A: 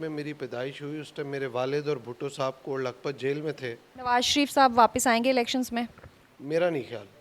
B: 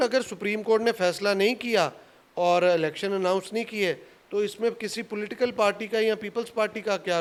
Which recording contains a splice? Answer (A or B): A